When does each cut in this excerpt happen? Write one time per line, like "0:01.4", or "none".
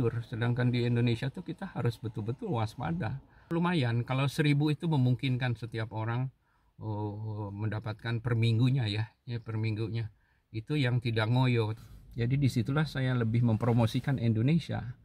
0:03.5
0:11.8

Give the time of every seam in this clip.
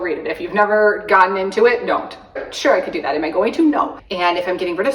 0:02.4
0:04.0

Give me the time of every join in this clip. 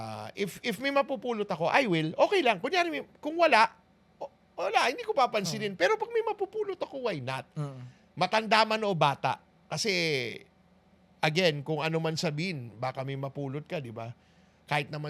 none

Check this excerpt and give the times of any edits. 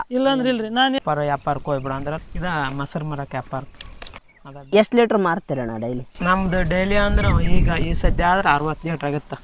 0:01.0

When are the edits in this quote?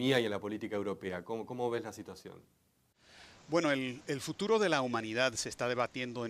0:04.8

